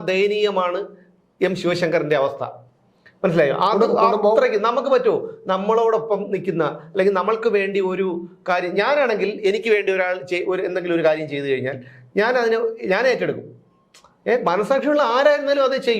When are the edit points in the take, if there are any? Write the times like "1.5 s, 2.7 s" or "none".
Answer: none